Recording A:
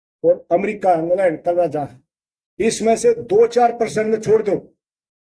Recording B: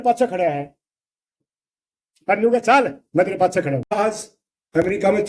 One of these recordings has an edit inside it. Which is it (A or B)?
B